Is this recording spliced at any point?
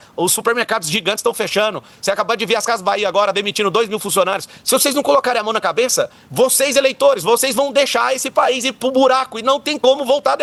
no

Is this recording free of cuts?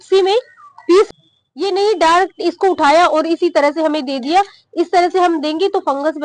no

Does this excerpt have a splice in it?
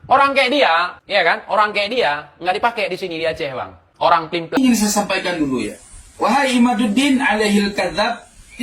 yes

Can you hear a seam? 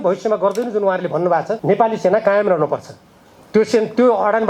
yes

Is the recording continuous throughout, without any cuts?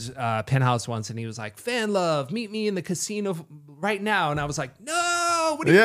yes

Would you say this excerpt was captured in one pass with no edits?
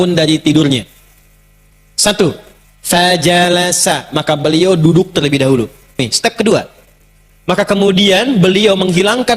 no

